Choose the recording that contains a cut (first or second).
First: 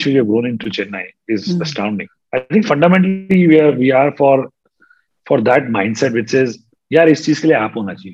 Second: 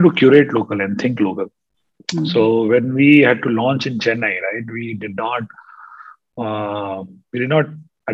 first